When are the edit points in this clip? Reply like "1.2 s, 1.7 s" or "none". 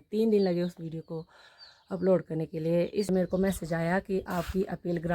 3.1 s